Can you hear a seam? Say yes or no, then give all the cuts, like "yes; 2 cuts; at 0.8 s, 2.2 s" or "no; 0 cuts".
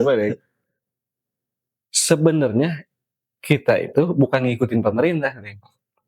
no; 0 cuts